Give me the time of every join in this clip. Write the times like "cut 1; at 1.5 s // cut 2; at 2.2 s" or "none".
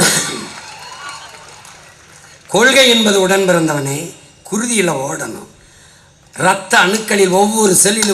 none